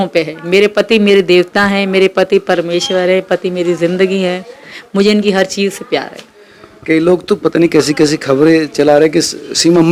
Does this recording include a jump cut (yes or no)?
no